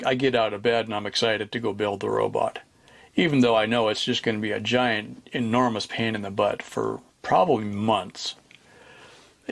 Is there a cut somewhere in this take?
no; 0 cuts

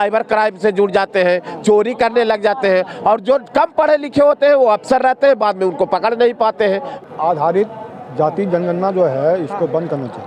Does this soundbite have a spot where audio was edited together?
yes; 1 cut; at 6.9 s

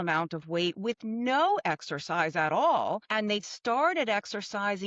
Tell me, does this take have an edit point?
yes; 1 cut; at 3.1 s

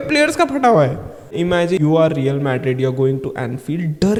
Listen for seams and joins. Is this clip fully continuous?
yes; 0 cuts

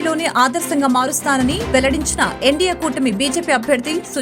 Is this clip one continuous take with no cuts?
yes; 0 cuts

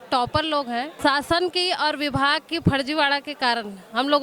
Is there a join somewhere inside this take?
yes; 1 cut; at 0.9 s

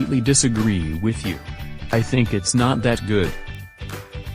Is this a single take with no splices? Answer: no; 1 cut; at 3.3 s

